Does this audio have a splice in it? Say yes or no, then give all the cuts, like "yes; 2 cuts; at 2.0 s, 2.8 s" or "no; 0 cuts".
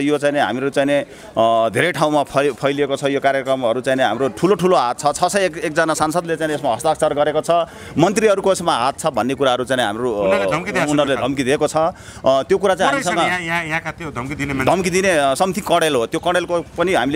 no; 0 cuts